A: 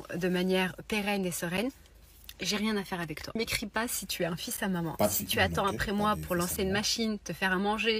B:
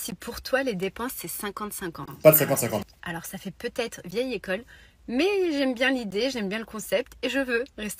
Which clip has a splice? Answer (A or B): A